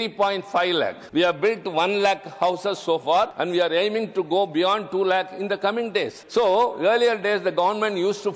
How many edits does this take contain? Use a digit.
3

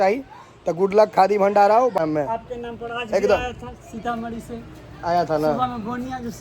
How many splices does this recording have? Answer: 1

